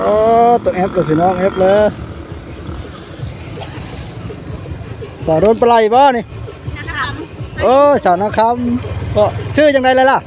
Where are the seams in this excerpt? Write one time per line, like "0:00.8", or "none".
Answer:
none